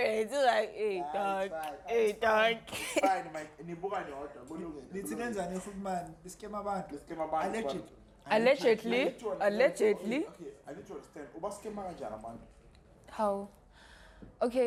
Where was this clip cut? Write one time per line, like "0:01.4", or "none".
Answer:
none